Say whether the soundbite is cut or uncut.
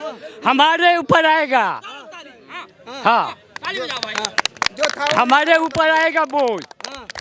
uncut